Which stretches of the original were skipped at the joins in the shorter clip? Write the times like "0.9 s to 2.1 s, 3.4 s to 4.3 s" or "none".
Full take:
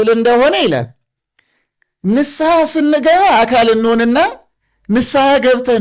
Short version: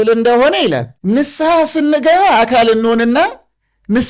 0.9 s to 1.9 s